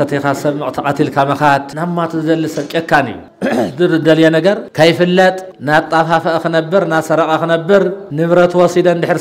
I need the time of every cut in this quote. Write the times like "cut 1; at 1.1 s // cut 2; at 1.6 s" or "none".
cut 1; at 1.7 s // cut 2; at 3.2 s // cut 3; at 4.7 s // cut 4; at 5.5 s // cut 5; at 8.0 s